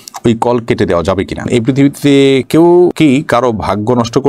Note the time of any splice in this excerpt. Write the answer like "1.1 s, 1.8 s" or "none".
1.5 s